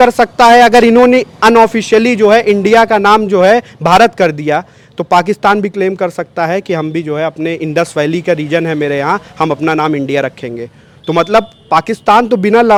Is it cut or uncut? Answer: uncut